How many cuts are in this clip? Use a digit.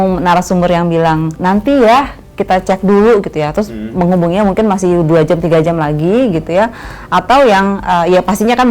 1